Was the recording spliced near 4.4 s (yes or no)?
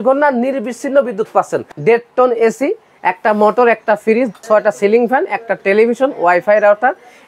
yes